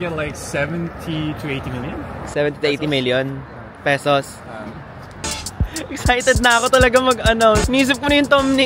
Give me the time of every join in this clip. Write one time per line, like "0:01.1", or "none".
0:05.2
0:07.6